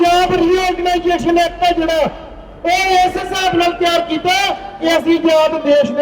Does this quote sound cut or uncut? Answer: uncut